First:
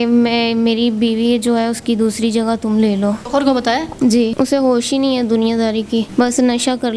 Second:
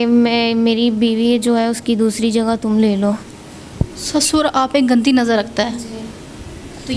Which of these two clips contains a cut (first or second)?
first